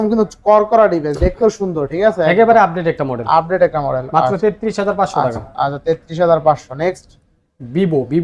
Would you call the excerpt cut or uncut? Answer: uncut